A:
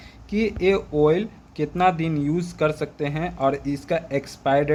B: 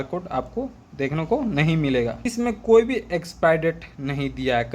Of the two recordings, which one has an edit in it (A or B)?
B